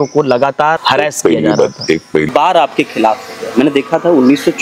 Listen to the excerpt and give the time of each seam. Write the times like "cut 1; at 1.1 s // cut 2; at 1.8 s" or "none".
cut 1; at 0.8 s // cut 2; at 2.3 s